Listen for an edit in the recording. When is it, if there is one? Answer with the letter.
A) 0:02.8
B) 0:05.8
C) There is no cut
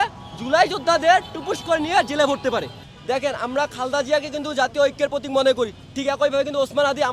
A